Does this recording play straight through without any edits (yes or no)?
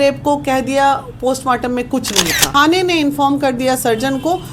no